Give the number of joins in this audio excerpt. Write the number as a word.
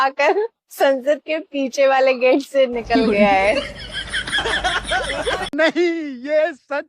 one